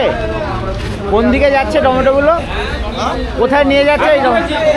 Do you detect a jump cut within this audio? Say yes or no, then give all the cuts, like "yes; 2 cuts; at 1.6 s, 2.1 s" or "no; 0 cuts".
no; 0 cuts